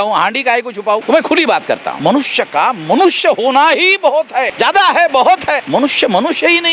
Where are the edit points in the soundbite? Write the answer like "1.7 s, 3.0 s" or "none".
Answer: 1.0 s, 1.9 s, 4.5 s, 5.6 s